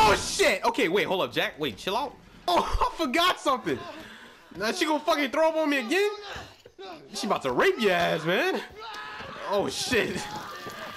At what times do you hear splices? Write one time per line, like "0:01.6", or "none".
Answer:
0:02.5